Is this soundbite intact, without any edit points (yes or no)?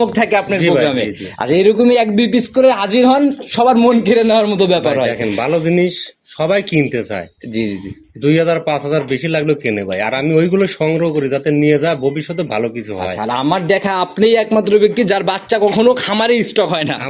yes